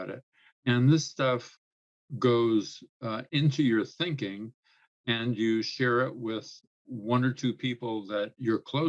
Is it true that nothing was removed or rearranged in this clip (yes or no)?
yes